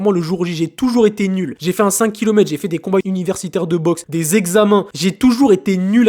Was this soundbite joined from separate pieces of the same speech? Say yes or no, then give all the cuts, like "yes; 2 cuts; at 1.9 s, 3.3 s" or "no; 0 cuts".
yes; 4 cuts; at 1.6 s, 3.0 s, 4.0 s, 4.9 s